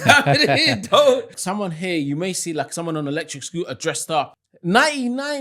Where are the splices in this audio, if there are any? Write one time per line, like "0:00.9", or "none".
0:01.3
0:04.3